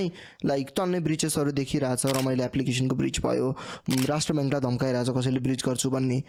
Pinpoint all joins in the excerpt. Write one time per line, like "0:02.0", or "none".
none

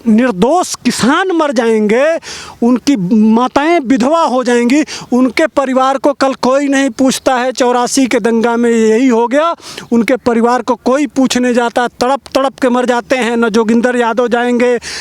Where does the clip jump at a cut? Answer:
none

